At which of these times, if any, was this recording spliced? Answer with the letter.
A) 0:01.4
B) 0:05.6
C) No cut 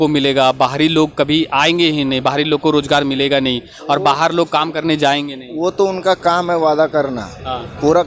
C